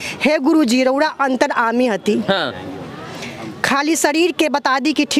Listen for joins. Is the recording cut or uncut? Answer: uncut